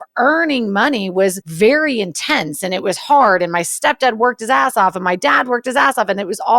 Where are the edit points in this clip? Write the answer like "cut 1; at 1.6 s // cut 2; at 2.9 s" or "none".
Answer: cut 1; at 1.4 s

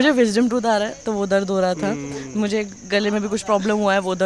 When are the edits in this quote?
none

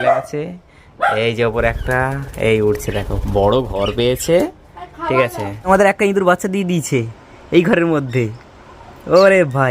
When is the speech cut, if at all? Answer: cut 1; at 5.5 s

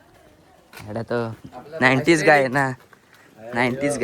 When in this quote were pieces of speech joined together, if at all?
none

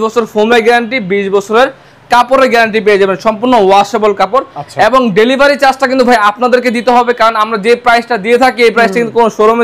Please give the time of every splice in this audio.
none

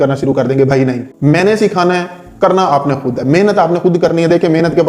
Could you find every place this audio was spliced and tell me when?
cut 1; at 1.1 s

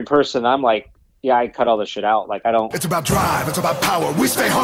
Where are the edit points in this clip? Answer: cut 1; at 2.8 s

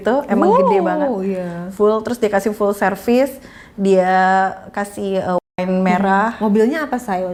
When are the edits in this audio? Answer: none

